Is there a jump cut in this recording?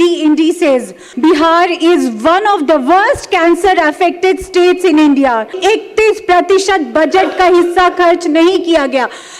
yes; 2 cuts; at 1.0 s, 5.6 s

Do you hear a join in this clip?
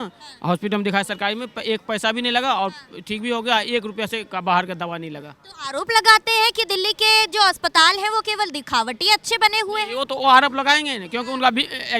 no; 0 cuts

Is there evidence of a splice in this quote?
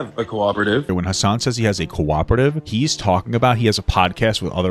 yes; 2 cuts; at 0.9 s, 2.6 s

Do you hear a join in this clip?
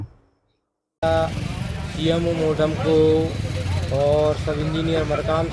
yes; 1 cut; at 1.0 s

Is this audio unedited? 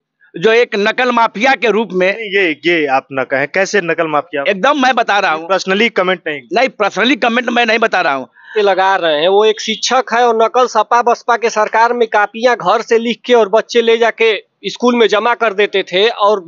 no; 1 cut; at 8.5 s

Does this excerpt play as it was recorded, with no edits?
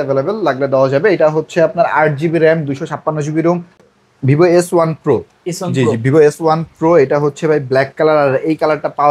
no; 1 cut; at 3.8 s

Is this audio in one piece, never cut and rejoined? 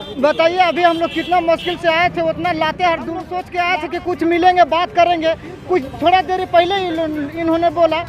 no; 1 cut; at 3.4 s

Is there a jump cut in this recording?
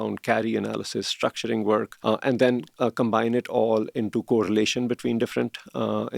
yes; 2 cuts; at 1.9 s, 2.7 s

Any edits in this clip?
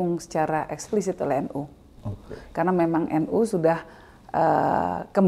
no; 0 cuts

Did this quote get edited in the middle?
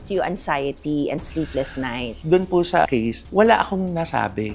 yes; 1 cut; at 2.2 s

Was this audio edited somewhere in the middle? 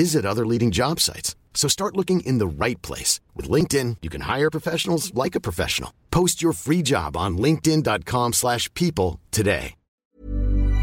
yes; 1 cut; at 9.9 s

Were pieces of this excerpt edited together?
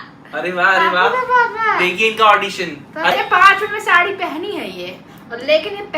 yes; 1 cut; at 3.1 s

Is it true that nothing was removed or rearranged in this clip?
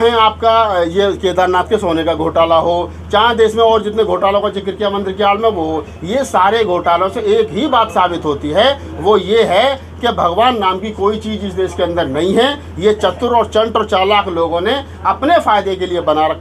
yes; 0 cuts

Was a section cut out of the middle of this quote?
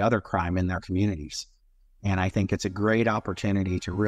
no; 0 cuts

